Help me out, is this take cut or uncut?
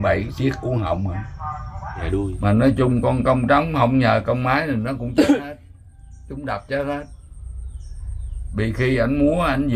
cut